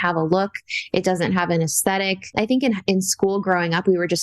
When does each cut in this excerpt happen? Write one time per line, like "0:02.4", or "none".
0:02.3